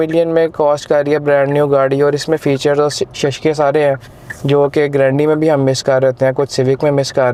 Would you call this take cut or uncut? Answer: uncut